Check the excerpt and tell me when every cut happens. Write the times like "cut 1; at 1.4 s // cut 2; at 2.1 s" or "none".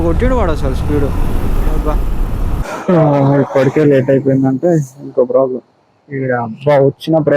cut 1; at 2.6 s